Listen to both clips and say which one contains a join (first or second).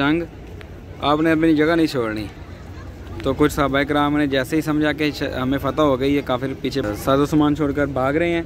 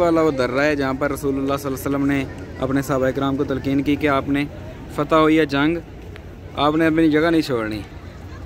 first